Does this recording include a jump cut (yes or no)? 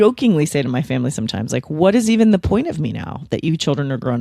no